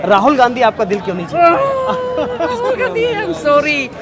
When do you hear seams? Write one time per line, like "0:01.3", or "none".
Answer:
none